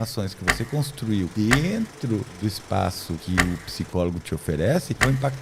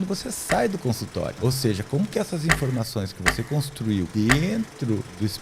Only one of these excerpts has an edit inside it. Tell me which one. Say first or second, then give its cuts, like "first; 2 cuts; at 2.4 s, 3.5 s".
second; 1 cut; at 1.4 s